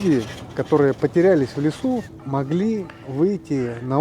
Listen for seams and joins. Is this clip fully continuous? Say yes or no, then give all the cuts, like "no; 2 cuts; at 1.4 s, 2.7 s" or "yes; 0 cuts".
no; 1 cut; at 2.2 s